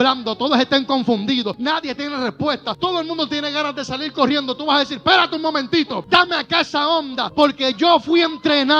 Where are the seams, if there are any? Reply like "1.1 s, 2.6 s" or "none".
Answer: 1.6 s, 2.7 s, 6.0 s, 7.2 s